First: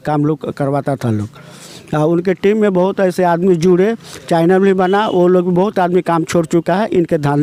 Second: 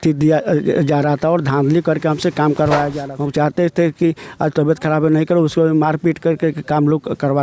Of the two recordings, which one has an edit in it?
second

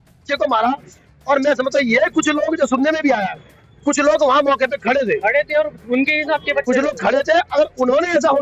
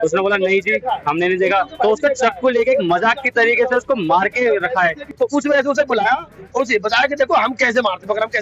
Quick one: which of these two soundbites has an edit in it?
second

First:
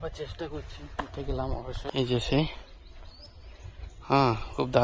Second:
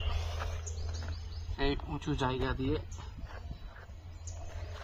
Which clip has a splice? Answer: first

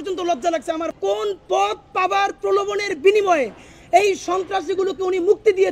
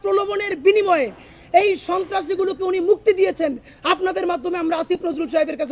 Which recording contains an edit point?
first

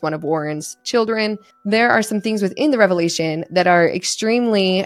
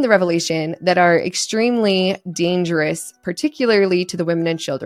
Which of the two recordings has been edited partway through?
first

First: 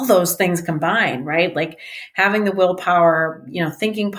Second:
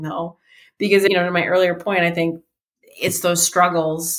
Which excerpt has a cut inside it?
second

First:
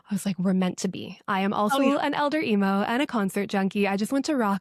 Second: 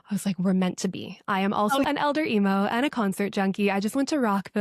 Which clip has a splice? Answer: second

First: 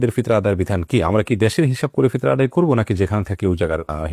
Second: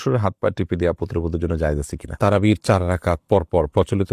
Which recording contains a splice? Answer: second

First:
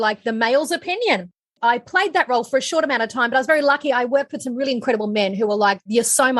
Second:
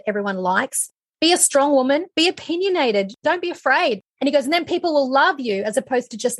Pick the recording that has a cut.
first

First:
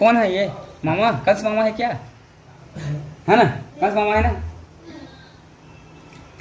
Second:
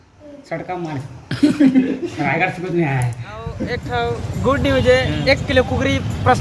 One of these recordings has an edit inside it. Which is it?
second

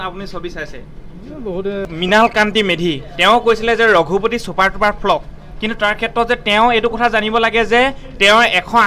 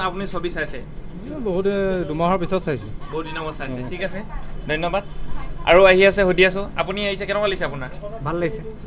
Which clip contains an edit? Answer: first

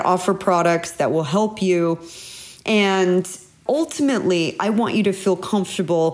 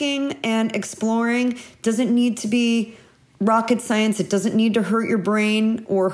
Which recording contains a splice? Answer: first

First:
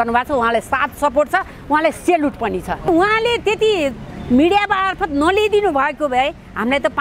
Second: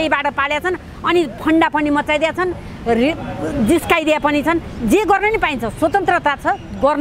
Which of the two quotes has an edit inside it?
first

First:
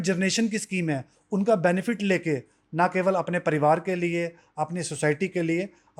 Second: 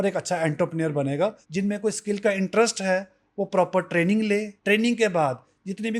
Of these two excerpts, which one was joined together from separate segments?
second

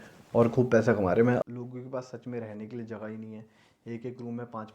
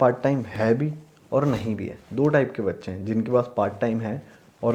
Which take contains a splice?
first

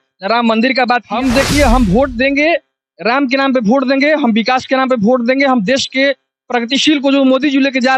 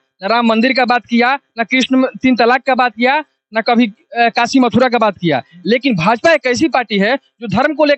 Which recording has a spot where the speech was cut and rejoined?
first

